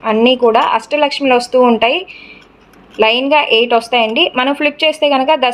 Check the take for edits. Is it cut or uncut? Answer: uncut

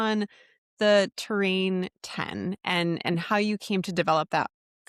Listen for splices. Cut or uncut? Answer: uncut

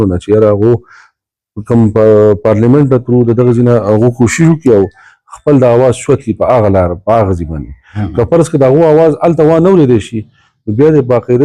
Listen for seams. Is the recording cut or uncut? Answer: uncut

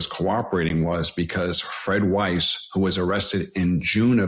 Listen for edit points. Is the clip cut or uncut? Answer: uncut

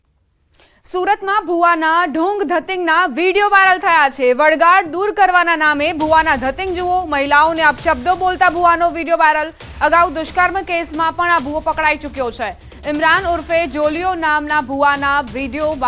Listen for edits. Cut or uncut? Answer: uncut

